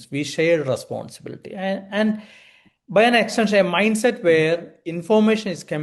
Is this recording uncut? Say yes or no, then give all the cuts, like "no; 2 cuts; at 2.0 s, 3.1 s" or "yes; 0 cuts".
yes; 0 cuts